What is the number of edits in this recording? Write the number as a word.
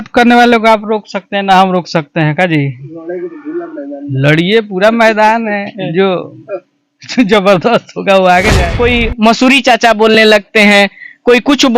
one